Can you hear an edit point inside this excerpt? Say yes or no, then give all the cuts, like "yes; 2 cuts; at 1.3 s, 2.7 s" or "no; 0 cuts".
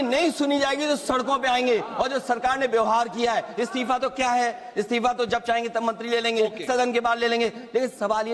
no; 0 cuts